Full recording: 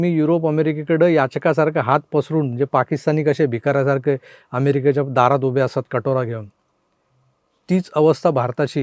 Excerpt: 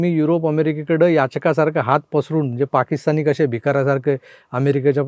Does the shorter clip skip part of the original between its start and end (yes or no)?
no